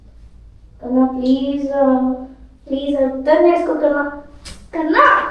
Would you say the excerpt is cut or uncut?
uncut